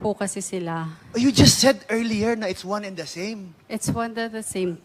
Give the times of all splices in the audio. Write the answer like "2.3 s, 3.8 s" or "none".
3.5 s